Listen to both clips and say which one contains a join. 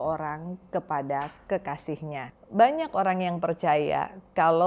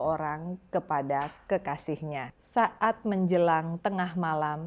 first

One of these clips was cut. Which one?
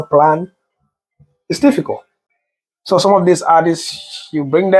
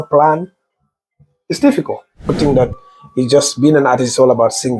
second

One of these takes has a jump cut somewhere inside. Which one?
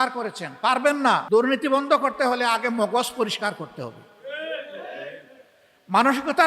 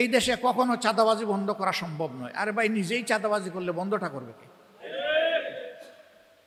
first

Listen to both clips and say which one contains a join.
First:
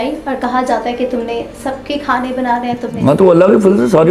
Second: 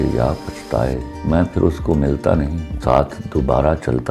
second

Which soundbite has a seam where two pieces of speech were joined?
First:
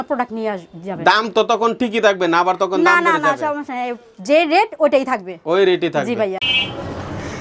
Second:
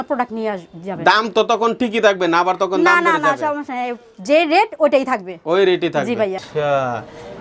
second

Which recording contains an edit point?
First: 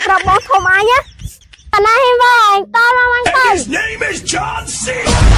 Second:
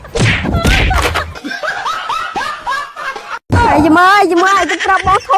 first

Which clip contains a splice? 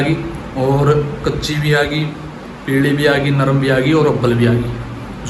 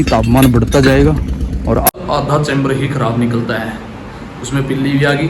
second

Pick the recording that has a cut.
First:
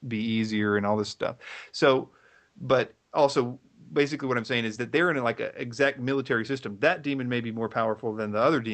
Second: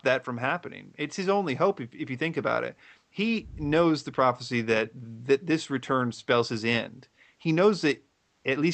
first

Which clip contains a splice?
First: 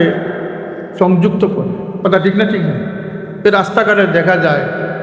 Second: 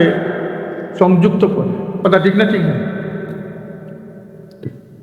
first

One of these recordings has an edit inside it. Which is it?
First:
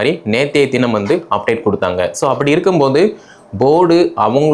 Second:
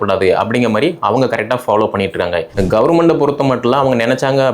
second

